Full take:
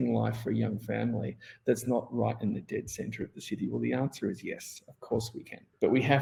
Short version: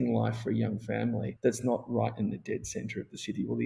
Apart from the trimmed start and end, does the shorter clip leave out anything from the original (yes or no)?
yes